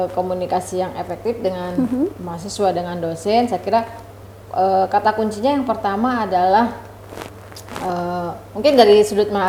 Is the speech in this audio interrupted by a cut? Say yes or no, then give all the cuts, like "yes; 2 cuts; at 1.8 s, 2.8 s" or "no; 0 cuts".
no; 0 cuts